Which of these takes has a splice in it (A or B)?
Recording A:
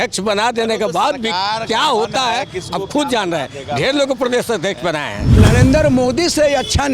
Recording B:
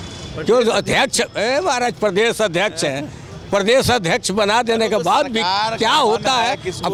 A